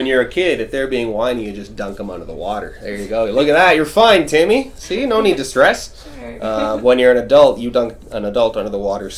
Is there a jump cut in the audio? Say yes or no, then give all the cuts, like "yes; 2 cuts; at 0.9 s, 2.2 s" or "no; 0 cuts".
no; 0 cuts